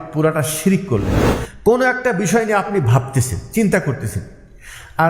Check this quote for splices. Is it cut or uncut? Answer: cut